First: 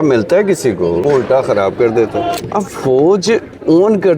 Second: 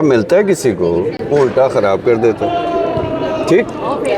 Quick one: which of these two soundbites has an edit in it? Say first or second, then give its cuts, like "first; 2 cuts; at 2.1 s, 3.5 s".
first; 2 cuts; at 1.0 s, 2.4 s